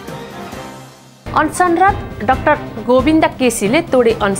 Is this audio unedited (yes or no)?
no